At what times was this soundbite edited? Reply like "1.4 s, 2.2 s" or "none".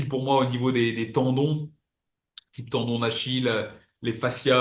none